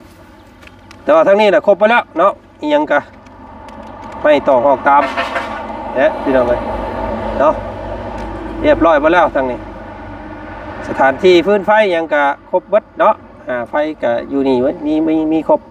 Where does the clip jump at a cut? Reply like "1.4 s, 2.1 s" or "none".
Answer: none